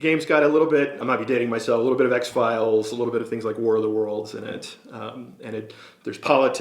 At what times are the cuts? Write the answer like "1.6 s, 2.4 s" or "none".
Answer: 1.0 s